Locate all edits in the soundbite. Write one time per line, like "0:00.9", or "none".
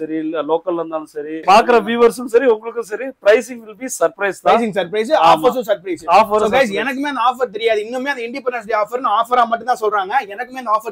0:01.4